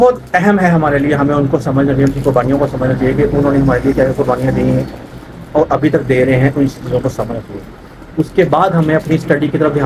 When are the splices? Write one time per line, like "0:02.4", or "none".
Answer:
none

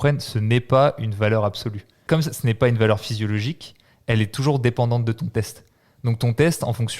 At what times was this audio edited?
0:02.0

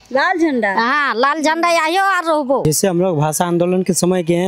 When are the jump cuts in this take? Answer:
0:02.6

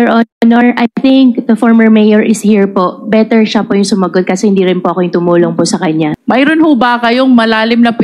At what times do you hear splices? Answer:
0:06.2

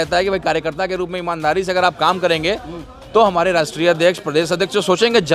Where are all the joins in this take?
none

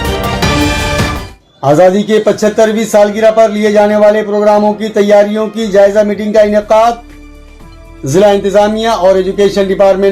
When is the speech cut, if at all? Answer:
0:01.3

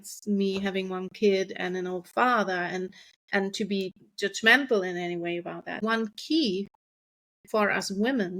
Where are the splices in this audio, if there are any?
0:05.8

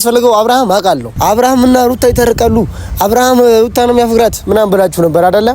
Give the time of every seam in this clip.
0:01.1

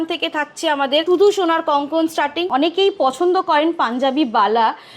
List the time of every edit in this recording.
0:01.0
0:02.4

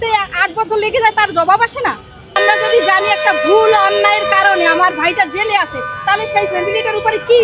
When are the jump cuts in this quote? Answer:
0:02.4

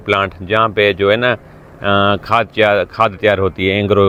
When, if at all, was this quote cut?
none

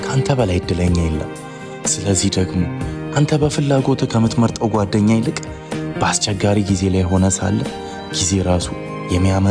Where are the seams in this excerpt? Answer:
none

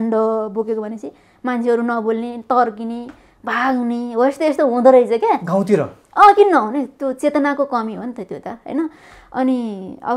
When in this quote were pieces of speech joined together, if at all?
none

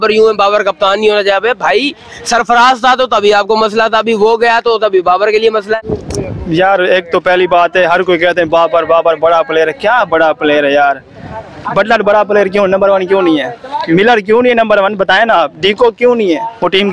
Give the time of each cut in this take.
0:05.8

